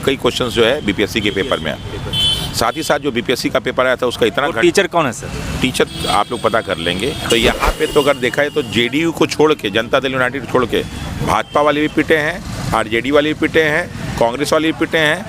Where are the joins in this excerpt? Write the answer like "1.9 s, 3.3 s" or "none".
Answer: 7.2 s